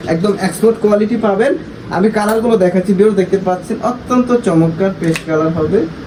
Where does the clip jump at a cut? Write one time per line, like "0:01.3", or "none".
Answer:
none